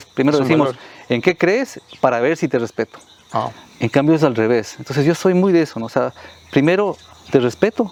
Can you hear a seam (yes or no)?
no